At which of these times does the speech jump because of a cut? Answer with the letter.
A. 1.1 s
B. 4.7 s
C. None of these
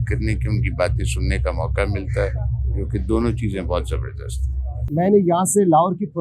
B